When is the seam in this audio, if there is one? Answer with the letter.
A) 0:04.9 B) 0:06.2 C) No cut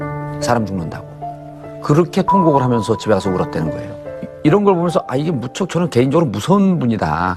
A